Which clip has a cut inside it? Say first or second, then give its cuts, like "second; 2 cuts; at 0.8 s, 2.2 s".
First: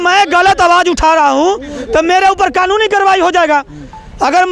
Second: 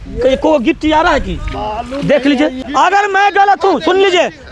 second; 1 cut; at 2.6 s